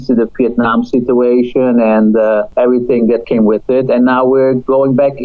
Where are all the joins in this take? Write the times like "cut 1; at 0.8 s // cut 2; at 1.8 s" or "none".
cut 1; at 2.5 s